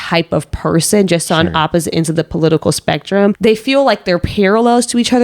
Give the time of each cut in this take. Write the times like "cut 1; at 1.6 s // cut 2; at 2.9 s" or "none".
cut 1; at 3.4 s

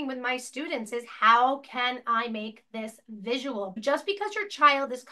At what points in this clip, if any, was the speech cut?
cut 1; at 3.7 s

